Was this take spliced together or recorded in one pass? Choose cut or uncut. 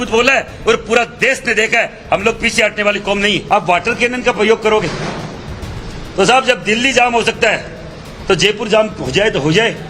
cut